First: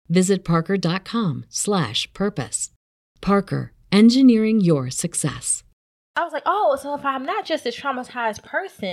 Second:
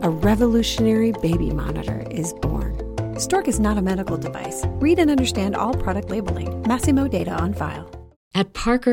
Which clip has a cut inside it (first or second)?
first